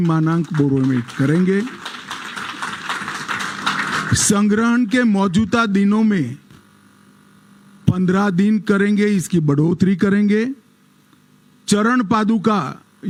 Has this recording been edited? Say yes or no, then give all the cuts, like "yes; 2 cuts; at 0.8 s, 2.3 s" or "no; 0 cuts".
no; 0 cuts